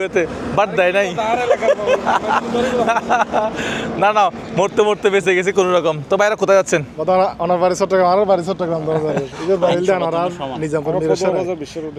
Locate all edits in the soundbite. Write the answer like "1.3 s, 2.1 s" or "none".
none